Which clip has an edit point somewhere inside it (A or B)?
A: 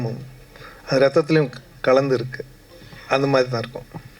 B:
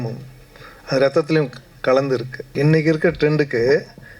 B